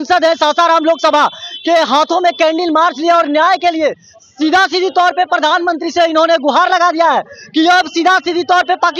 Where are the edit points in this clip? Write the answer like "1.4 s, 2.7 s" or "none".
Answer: none